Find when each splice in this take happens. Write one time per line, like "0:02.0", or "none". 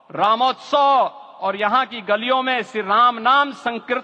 none